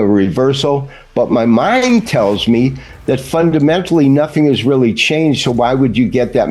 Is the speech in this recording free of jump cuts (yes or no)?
yes